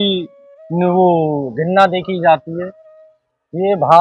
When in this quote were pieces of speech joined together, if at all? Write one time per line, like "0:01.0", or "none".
0:02.9

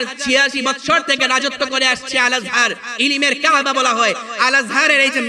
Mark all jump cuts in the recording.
none

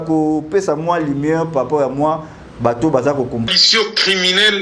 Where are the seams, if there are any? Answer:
0:03.5

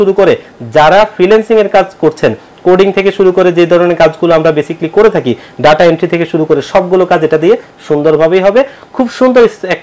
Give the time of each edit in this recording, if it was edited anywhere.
none

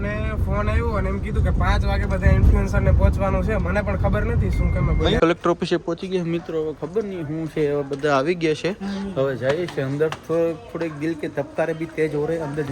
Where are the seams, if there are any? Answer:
0:05.2

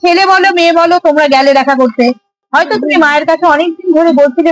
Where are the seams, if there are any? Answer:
0:02.4

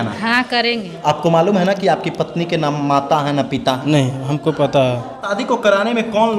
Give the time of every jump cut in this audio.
0:00.9
0:05.3

